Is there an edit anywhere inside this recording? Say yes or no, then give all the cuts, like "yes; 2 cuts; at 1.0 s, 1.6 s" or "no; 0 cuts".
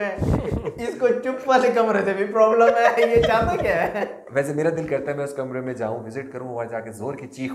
no; 0 cuts